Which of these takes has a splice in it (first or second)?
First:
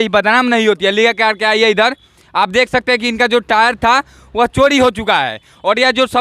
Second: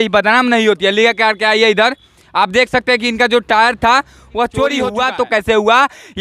second